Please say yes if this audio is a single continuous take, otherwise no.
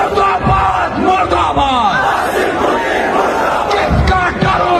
yes